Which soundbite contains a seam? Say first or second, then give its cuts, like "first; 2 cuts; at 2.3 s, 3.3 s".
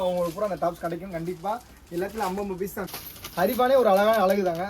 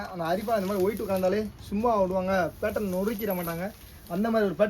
first; 1 cut; at 2.9 s